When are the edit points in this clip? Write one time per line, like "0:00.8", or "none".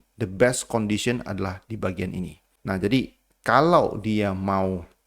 0:02.4